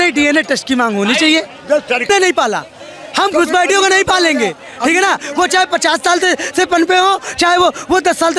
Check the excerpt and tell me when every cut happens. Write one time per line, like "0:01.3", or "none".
0:02.1